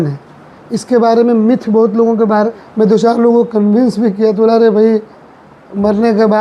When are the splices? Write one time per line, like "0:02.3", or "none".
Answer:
0:02.6